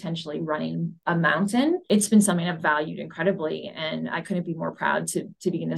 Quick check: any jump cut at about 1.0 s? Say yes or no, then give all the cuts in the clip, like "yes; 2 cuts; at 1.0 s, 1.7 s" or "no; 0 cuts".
yes; 2 cuts; at 1.0 s, 1.8 s